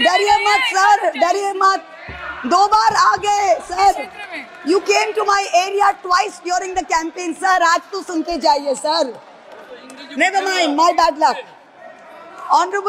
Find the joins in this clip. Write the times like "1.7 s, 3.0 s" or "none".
none

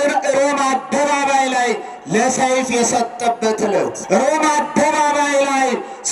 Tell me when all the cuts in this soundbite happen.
4.0 s

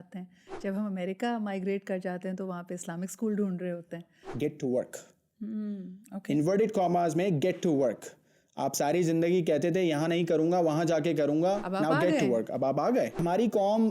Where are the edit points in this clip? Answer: 4.2 s, 13.2 s

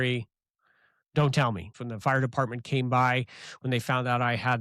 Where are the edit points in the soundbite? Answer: 1.9 s

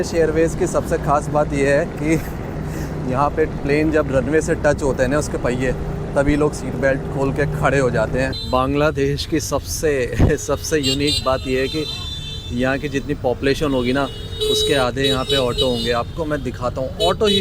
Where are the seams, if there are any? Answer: 8.4 s

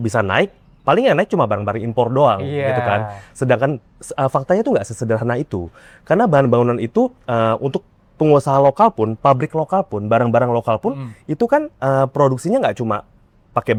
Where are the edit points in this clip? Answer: none

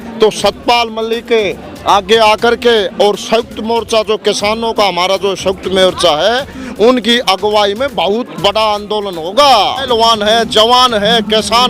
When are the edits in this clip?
9.8 s

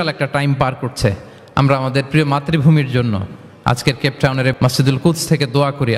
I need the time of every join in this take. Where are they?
4.5 s

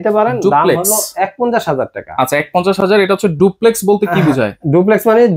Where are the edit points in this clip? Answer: none

